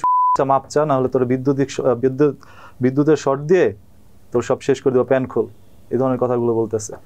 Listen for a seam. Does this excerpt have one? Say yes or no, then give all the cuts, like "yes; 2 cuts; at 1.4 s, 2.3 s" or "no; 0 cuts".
no; 0 cuts